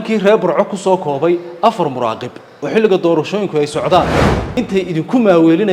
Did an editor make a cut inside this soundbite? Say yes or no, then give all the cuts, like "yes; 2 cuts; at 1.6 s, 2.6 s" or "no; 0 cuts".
yes; 1 cut; at 4.4 s